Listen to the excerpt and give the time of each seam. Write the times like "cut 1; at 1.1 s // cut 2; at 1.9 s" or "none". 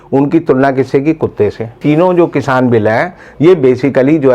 cut 1; at 1.8 s